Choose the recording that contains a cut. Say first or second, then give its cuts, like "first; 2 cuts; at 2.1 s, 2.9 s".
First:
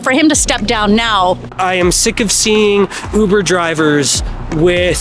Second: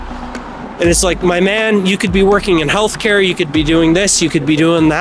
first; 1 cut; at 1.5 s